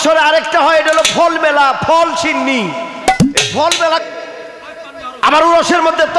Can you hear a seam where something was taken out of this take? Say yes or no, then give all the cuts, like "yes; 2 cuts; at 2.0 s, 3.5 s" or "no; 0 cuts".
yes; 1 cut; at 4.0 s